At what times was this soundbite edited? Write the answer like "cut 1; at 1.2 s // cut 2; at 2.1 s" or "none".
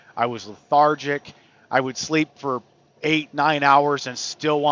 none